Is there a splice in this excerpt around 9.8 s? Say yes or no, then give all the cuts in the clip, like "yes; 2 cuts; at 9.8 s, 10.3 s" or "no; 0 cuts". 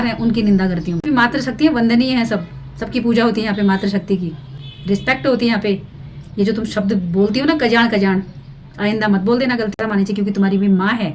yes; 2 cuts; at 0.9 s, 9.8 s